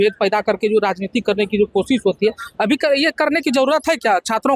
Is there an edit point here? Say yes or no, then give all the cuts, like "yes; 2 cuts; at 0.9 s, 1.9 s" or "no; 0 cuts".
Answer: no; 0 cuts